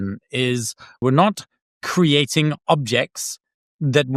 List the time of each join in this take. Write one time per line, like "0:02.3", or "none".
0:01.0

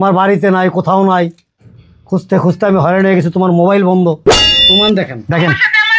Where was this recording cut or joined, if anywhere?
0:04.7

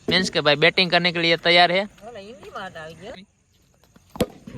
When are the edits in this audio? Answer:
0:03.1

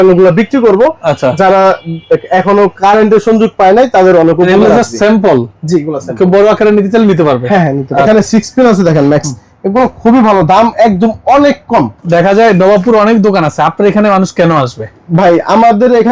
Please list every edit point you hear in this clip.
0:08.0
0:12.0

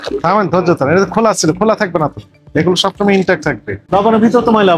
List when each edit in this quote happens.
0:03.7

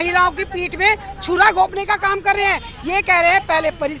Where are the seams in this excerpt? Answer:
none

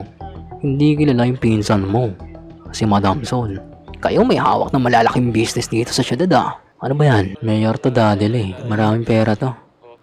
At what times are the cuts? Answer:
0:07.3

